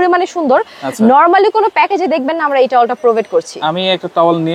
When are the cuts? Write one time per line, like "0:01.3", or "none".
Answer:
none